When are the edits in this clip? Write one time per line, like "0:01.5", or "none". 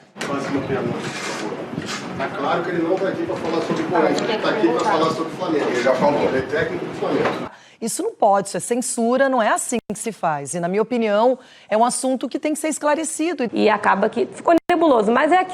0:07.5
0:13.5